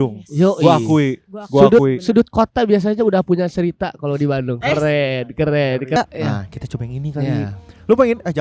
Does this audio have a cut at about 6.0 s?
yes; 1 cut; at 6.0 s

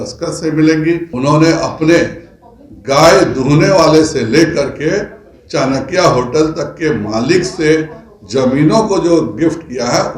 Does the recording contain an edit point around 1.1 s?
yes; 1 cut; at 1.1 s

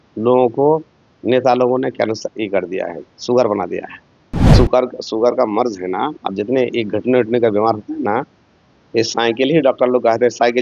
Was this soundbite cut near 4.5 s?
yes; 1 cut; at 4.5 s

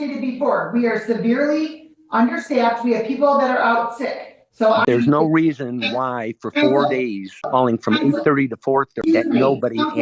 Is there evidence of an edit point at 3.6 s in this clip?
no; 3 cuts; at 4.9 s, 7.4 s, 9.1 s

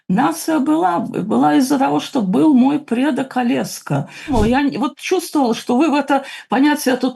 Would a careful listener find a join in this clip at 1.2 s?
no; 1 cut; at 4.3 s

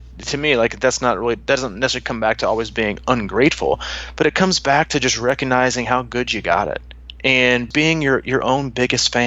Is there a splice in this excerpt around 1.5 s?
no; 1 cut; at 7.7 s

